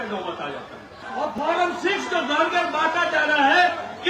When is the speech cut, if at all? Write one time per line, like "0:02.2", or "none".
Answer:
0:01.0

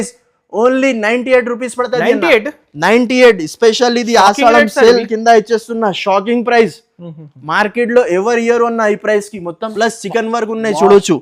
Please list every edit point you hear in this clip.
0:09.6

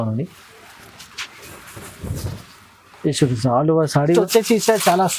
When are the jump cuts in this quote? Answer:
0:04.1

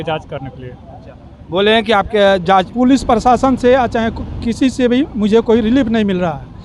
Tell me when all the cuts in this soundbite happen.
0:02.7

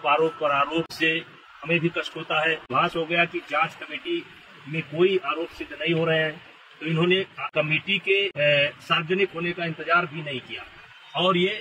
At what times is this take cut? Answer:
0:02.7

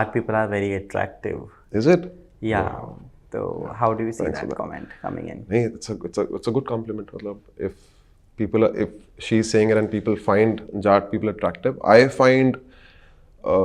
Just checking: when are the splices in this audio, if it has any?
none

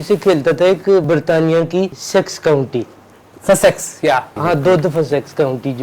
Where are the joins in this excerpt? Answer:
0:01.0
0:02.0
0:04.3

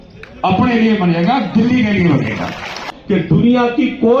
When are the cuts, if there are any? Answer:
0:02.9

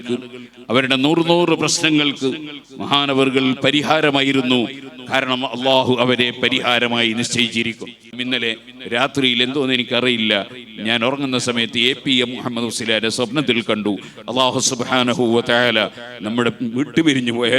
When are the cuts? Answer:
0:08.2

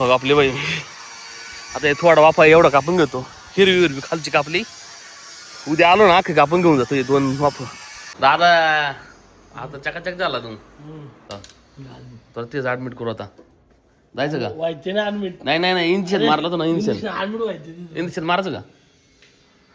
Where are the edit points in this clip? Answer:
0:08.1
0:11.2

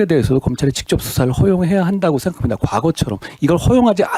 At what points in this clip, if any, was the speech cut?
none

